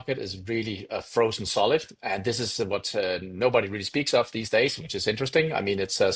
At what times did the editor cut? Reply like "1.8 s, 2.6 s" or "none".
none